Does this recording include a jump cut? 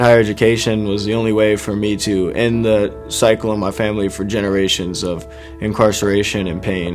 no; 0 cuts

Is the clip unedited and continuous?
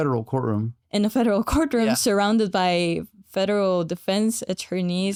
yes; 0 cuts

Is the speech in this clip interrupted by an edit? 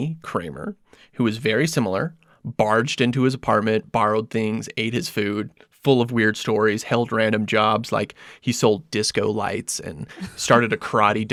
no; 0 cuts

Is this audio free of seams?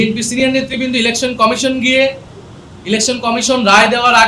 yes; 0 cuts

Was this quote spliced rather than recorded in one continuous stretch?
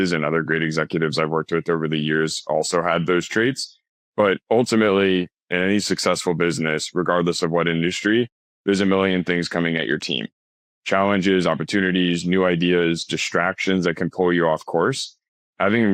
no; 0 cuts

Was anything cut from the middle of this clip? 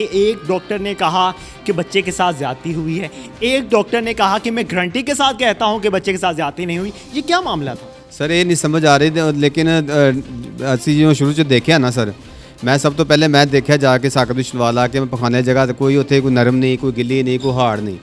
no; 0 cuts

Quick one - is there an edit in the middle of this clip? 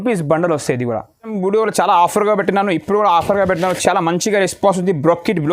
yes; 1 cut; at 1.3 s

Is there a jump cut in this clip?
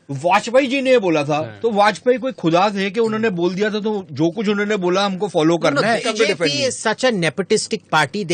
yes; 1 cut; at 6.1 s

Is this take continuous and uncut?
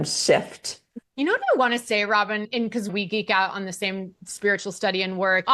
yes; 0 cuts

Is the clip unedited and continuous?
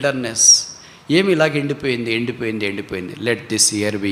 yes; 0 cuts

